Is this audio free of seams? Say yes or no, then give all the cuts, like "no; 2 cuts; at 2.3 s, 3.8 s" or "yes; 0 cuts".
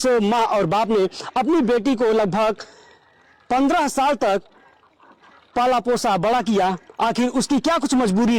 yes; 0 cuts